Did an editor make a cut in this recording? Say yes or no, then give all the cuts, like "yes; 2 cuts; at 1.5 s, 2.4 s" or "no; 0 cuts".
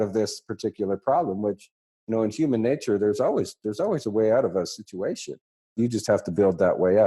yes; 1 cut; at 5.7 s